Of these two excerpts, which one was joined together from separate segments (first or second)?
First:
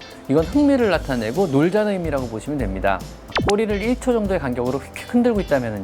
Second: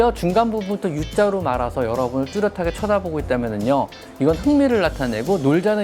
first